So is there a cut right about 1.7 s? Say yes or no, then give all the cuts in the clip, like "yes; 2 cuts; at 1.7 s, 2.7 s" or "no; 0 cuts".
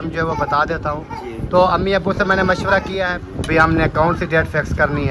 no; 1 cut; at 3.2 s